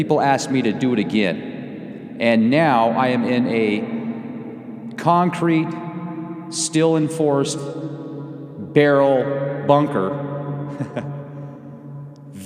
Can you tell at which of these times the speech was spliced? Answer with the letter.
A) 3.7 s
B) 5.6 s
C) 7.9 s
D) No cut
A